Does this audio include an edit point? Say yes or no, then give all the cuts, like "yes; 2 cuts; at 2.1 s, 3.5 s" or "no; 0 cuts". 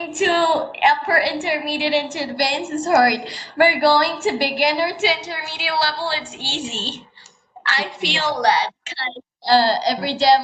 no; 0 cuts